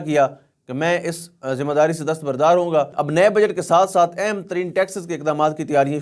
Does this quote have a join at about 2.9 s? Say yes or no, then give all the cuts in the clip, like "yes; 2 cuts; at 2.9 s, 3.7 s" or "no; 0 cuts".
yes; 1 cut; at 2.9 s